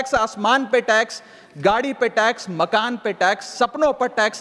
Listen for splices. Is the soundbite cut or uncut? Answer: uncut